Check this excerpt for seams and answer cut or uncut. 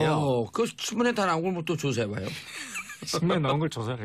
uncut